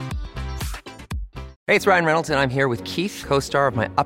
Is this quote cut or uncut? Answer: cut